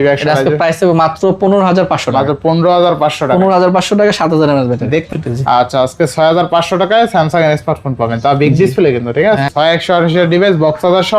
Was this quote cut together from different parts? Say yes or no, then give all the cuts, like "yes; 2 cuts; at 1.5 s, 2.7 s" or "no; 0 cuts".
yes; 2 cuts; at 5.1 s, 9.5 s